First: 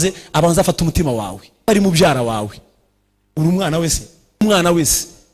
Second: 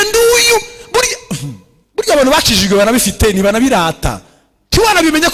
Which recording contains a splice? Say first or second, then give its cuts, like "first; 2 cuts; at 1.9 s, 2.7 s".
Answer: first; 2 cuts; at 1.7 s, 4.4 s